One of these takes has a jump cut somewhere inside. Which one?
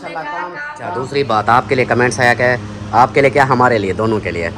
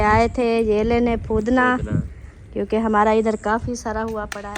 first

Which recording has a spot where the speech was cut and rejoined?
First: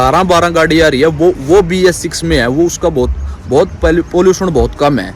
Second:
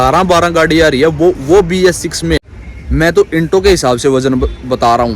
second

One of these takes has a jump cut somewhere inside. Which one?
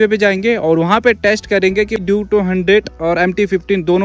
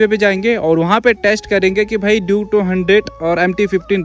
first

